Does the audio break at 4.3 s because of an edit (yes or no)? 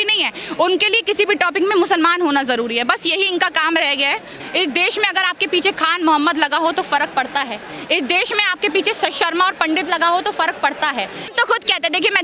yes